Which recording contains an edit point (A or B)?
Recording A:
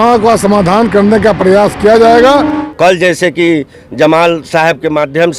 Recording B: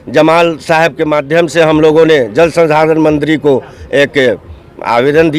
A